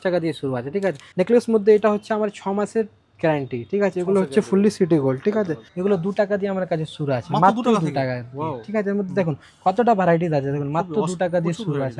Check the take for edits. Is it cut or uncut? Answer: cut